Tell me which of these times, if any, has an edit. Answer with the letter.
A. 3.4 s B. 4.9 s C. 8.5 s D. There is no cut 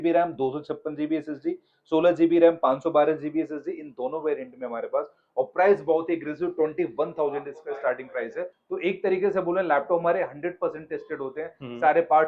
C